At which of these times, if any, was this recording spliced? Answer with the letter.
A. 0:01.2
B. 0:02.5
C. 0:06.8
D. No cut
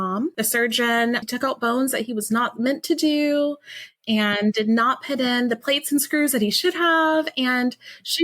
A